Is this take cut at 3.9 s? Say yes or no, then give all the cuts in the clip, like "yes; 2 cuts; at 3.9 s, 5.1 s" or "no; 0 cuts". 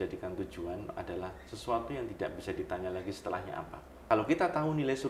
yes; 1 cut; at 3.9 s